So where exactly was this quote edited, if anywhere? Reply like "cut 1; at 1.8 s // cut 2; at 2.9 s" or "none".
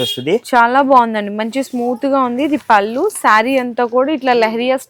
none